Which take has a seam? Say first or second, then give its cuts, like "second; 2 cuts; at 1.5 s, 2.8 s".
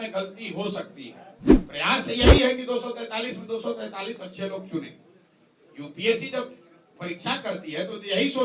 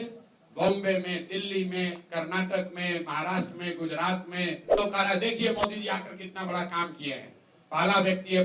second; 1 cut; at 4.8 s